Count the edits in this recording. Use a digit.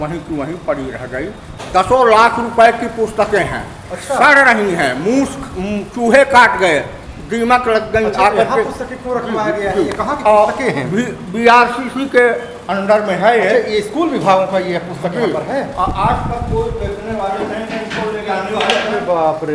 1